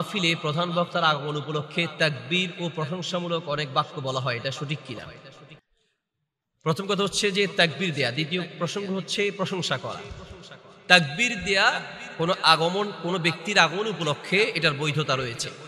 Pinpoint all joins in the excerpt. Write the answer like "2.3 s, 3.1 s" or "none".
none